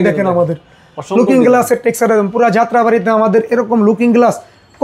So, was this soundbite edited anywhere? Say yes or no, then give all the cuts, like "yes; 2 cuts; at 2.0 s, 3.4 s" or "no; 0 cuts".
no; 0 cuts